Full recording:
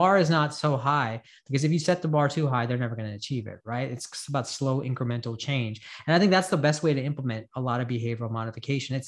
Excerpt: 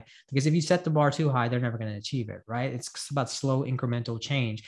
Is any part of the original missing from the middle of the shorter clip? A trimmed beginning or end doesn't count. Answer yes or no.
no